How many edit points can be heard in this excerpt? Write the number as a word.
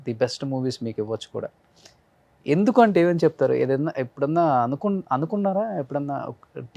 zero